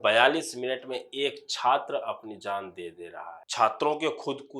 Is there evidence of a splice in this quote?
yes; 1 cut; at 3.4 s

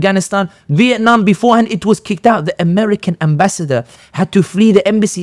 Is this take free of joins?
yes; 0 cuts

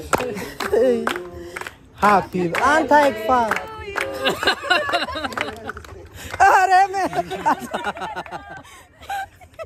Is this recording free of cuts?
yes; 0 cuts

